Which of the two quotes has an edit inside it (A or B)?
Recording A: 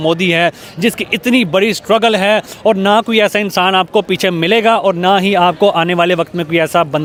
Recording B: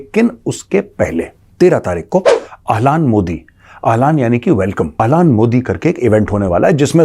B